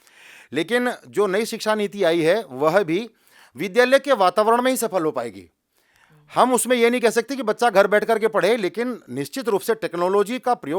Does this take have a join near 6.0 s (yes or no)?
no